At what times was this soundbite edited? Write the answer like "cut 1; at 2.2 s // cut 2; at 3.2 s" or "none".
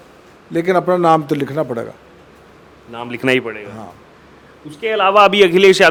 none